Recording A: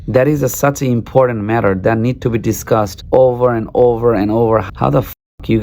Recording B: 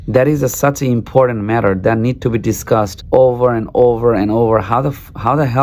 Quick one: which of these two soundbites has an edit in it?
A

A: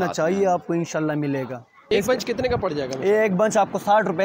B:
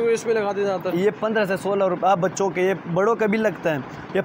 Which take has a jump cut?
A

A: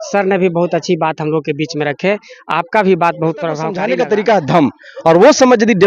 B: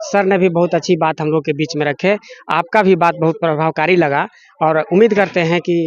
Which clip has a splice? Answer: A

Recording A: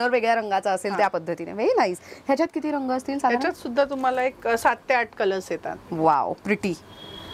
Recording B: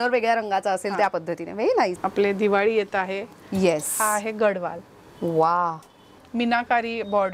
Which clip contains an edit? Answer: B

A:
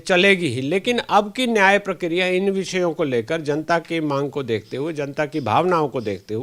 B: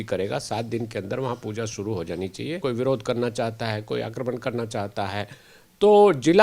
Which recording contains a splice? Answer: B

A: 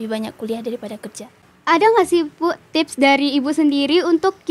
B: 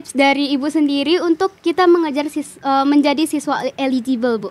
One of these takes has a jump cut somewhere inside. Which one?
A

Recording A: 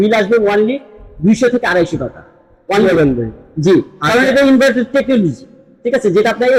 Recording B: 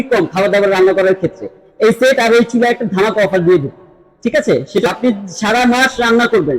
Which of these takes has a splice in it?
B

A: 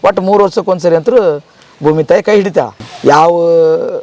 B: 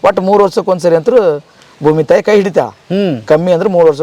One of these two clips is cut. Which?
A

